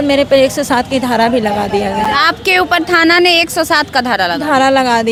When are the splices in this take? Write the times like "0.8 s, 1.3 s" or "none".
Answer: none